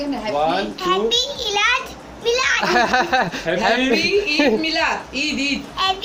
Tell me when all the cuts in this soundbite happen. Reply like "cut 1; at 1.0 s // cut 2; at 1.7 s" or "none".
none